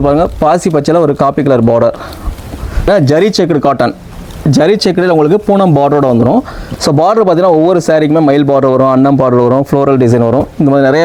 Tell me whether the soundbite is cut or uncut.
cut